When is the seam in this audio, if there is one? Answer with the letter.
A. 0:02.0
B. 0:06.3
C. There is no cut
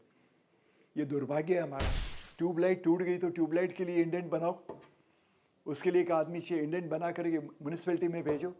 A